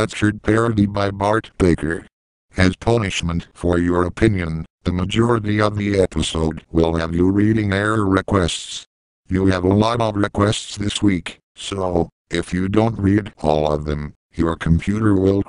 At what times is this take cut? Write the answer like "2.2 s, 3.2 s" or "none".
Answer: 11.5 s